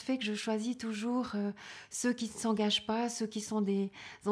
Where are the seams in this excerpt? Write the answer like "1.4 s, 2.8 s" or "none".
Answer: none